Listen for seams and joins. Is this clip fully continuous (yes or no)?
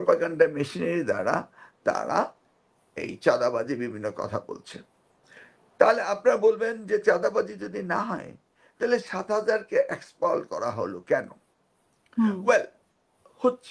yes